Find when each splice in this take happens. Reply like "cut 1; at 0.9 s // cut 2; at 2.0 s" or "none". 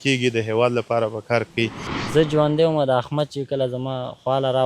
cut 1; at 1.9 s